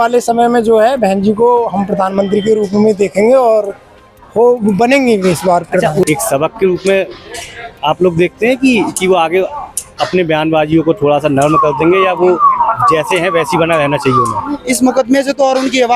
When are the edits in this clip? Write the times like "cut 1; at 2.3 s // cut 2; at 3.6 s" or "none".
cut 1; at 6.0 s